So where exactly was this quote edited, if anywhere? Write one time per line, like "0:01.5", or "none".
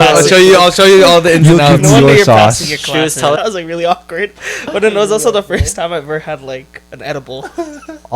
0:03.4